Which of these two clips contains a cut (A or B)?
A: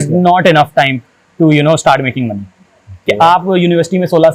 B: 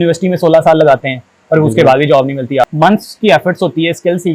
B